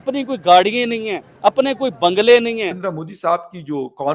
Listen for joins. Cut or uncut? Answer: cut